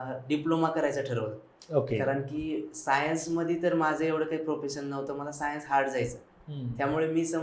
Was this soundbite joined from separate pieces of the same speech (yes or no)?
no